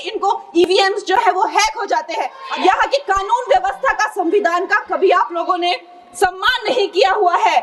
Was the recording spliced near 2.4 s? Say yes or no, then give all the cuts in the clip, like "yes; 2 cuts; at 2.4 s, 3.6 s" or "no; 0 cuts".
yes; 1 cut; at 2.4 s